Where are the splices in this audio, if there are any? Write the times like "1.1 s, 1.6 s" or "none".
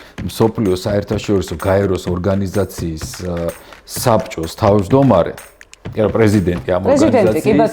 none